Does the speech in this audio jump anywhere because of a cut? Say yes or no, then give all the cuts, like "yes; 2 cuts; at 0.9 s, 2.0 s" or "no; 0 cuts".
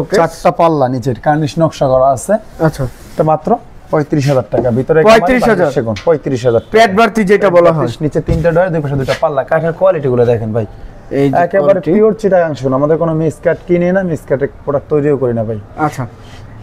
no; 0 cuts